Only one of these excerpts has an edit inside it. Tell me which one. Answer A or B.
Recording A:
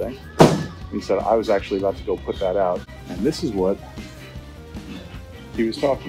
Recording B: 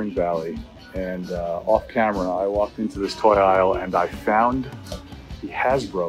A